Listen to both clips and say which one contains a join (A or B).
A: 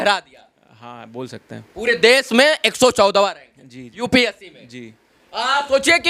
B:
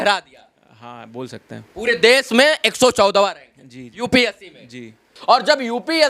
B